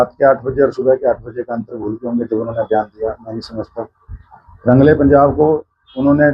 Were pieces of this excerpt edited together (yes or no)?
no